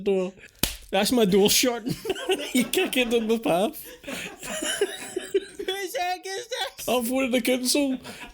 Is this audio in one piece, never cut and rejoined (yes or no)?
no